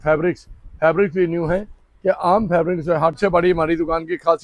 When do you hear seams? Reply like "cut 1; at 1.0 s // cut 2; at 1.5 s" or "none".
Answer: cut 1; at 3.2 s